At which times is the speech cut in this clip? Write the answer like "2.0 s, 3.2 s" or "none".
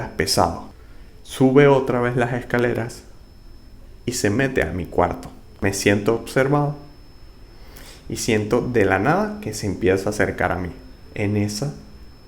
5.5 s